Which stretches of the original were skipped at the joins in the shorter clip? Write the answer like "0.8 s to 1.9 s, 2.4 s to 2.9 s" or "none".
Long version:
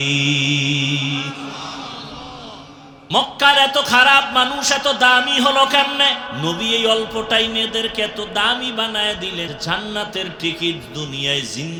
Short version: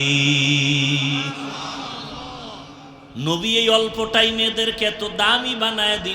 3.0 s to 6.2 s

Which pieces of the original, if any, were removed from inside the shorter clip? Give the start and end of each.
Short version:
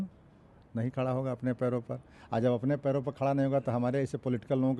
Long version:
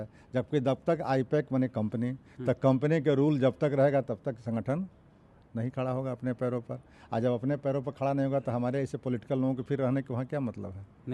none

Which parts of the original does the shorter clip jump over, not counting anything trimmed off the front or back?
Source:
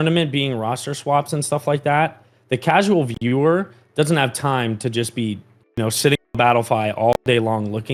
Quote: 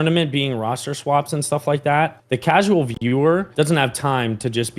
2.2 s to 2.4 s, 3.7 s to 3.9 s

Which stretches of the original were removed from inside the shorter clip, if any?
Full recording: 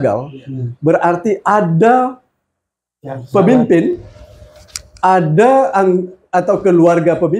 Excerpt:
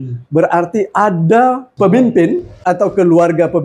2.2 s to 3.2 s, 4.1 s to 6.2 s

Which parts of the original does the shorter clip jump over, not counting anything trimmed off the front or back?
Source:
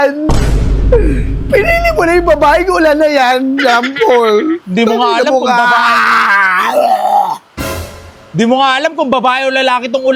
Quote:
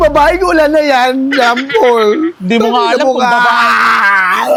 none

